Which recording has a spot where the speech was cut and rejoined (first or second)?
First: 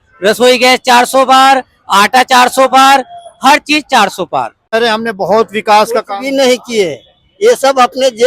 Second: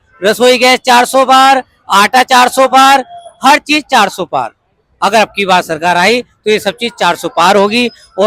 first